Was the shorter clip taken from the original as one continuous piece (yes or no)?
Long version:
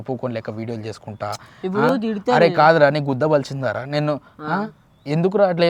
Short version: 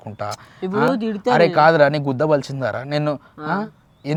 yes